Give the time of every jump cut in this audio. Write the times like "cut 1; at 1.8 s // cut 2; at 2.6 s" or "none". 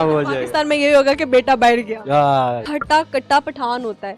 cut 1; at 2.7 s